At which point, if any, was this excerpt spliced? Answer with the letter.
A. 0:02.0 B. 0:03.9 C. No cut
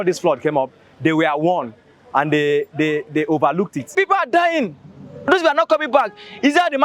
B